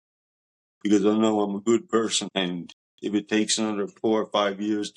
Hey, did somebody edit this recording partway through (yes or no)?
no